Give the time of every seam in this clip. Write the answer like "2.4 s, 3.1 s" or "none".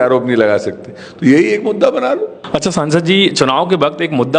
2.4 s